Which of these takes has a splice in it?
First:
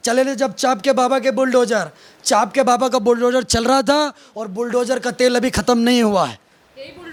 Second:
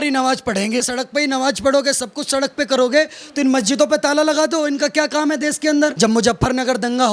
second; 2 cuts; at 1.0 s, 5.9 s

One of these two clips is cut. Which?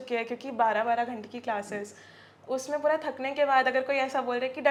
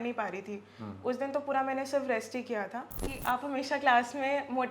second; 1 cut; at 3.0 s

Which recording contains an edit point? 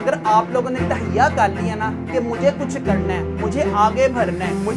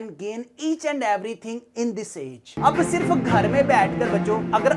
second; 1 cut; at 2.5 s

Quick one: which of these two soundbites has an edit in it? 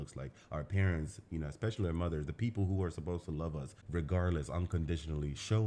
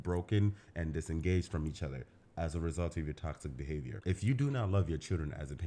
second; 1 cut; at 4.0 s

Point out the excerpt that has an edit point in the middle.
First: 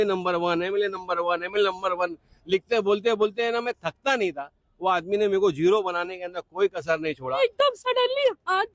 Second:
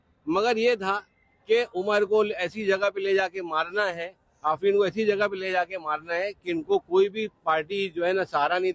first; 1 cut; at 7.4 s

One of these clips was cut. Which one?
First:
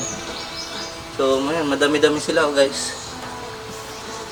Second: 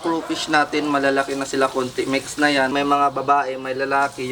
second; 1 cut; at 2.7 s

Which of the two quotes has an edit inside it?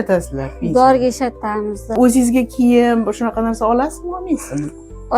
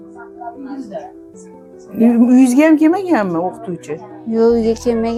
first; 1 cut; at 1.9 s

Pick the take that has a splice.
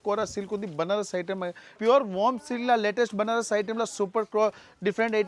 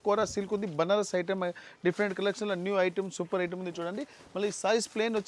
first; 1 cut; at 1.7 s

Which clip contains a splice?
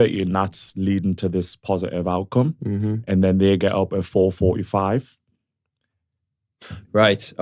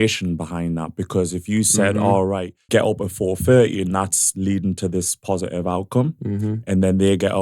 second; 1 cut; at 2.6 s

